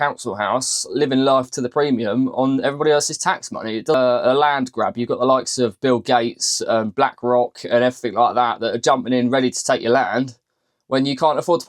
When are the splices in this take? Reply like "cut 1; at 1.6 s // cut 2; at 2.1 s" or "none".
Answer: cut 1; at 3.9 s

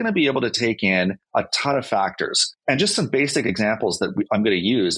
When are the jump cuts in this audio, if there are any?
cut 1; at 1.2 s // cut 2; at 2.5 s

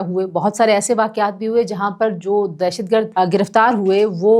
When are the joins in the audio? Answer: cut 1; at 3.1 s

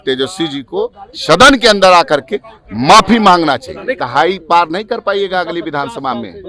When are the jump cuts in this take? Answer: cut 1; at 4.0 s

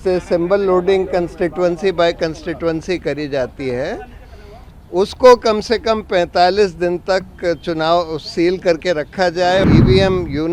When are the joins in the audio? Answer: cut 1; at 9.6 s

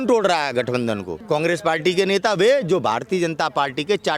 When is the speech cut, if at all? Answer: cut 1; at 1.1 s

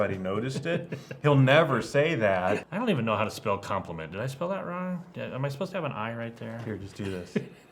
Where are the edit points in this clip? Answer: cut 1; at 2.7 s

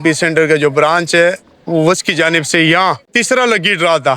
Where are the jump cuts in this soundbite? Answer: cut 1; at 3.1 s

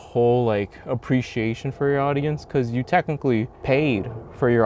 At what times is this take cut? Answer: cut 1; at 3.5 s

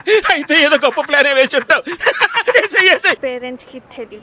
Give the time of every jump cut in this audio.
cut 1; at 3.2 s

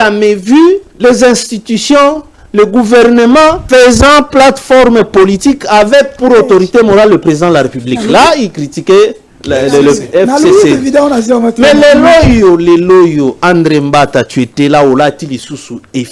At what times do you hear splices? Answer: cut 1; at 0.9 s // cut 2; at 3.6 s

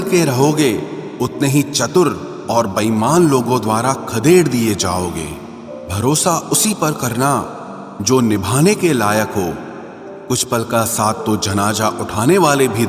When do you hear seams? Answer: none

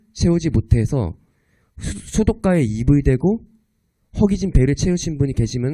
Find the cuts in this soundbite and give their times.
cut 1; at 1.1 s

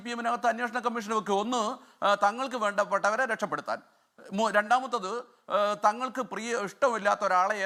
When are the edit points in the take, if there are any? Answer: none

